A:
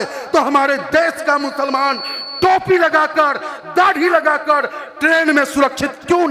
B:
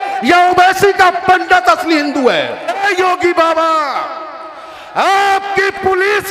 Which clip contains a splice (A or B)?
B